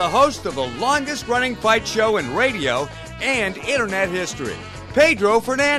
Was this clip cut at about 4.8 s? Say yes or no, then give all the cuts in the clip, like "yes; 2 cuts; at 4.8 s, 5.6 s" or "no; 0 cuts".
yes; 1 cut; at 4.8 s